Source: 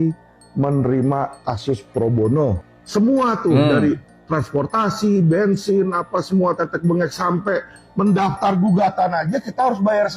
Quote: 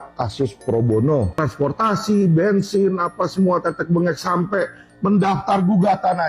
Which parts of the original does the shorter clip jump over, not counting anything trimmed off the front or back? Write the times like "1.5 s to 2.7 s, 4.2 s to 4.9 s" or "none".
2.7 s to 4.3 s